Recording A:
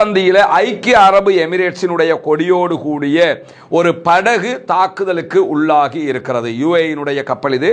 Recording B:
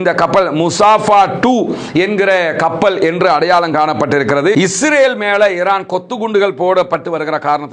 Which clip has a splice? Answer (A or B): B